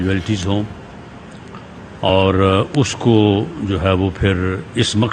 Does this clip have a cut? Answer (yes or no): no